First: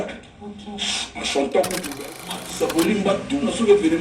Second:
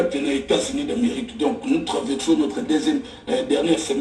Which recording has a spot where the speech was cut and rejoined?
first; 1 cut; at 2.0 s

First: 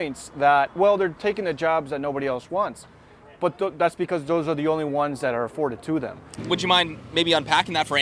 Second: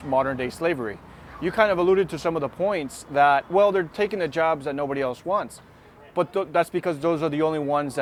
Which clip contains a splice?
first; 1 cut; at 6.3 s

